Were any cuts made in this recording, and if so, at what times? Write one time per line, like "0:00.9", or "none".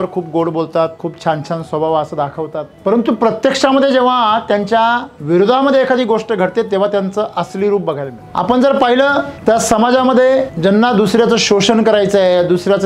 0:01.1
0:02.7
0:05.1
0:08.2
0:09.3
0:10.5

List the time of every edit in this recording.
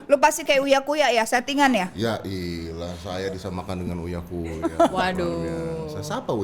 none

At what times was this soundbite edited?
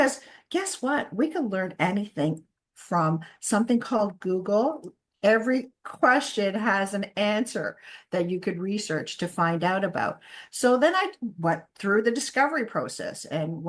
none

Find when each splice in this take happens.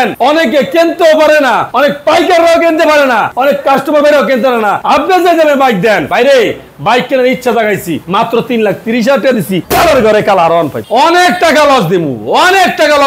0:01.7
0:03.3
0:04.8
0:06.1
0:08.0
0:09.6
0:10.8

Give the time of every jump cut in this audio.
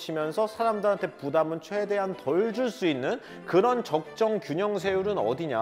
none

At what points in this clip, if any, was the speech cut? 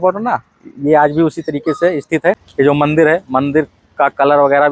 0:02.4

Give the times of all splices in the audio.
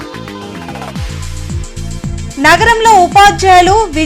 0:01.5
0:01.9

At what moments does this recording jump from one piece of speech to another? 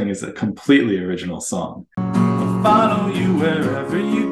0:02.0

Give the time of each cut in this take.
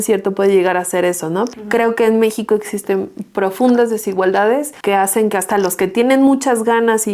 0:01.6
0:04.7

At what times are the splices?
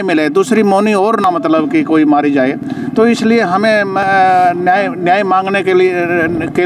none

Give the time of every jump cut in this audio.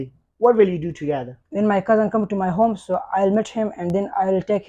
none

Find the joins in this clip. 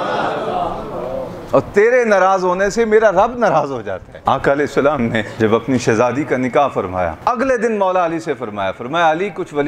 0:04.1
0:05.3
0:07.2

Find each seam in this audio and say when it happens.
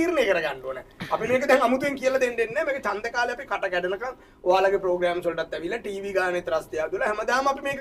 none

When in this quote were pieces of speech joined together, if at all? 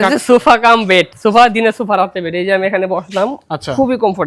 0:01.1

